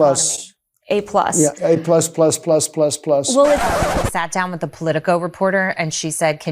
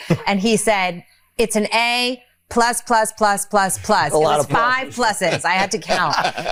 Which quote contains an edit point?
first; 1 cut; at 3.6 s

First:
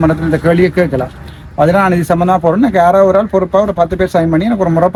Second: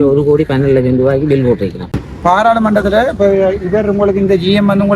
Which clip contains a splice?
second; 1 cut; at 1.9 s

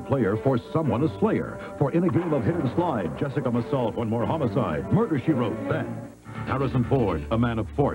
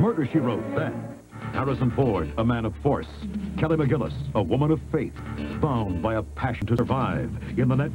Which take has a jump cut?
second; 2 cuts; at 5.5 s, 6.7 s

